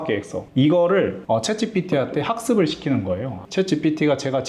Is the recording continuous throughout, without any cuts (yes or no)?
yes